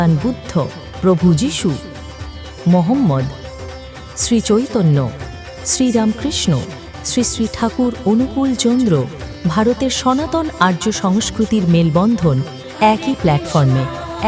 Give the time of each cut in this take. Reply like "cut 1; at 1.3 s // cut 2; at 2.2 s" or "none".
none